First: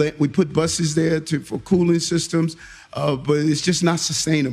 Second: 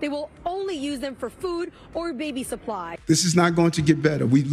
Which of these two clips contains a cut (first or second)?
second